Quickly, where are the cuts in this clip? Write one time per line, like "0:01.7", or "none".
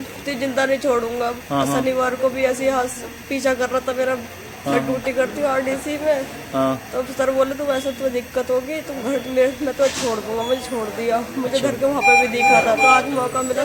none